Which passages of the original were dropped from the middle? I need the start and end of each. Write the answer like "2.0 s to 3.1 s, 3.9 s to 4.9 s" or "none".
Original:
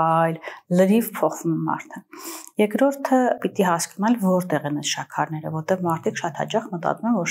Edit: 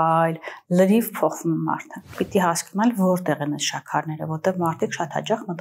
2.2 s to 3.4 s